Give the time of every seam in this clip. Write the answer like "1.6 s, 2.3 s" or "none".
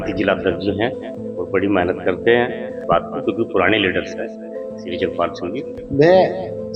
2.8 s, 5.8 s